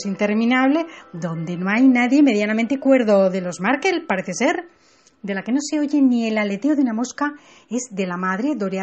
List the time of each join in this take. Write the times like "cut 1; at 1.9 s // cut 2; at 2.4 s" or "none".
none